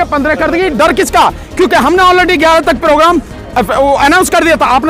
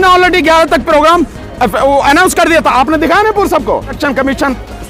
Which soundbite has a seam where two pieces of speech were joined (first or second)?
second